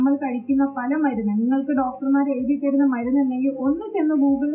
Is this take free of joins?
yes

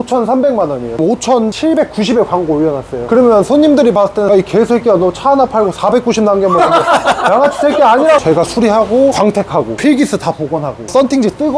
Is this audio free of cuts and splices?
no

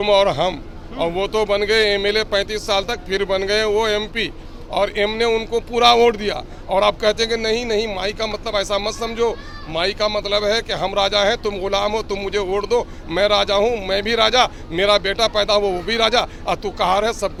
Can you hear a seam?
no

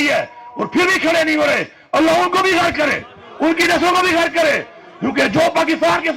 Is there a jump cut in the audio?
no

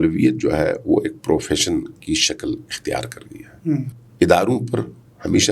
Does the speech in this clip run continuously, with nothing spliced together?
no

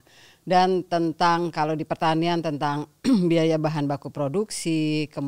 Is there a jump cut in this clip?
no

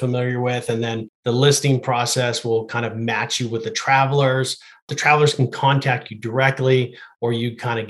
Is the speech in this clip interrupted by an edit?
yes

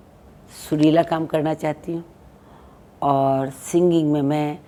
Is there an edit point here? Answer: no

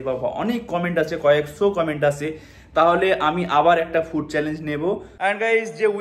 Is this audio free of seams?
no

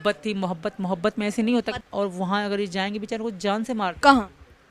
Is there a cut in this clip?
yes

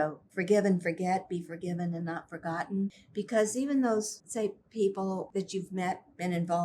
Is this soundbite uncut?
no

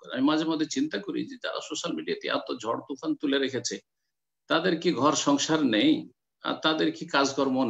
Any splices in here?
no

